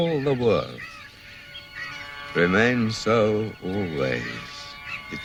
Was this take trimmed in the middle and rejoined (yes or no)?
no